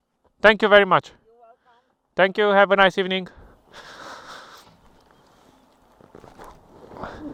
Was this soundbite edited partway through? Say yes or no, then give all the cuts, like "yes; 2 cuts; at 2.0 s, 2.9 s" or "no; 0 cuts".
no; 0 cuts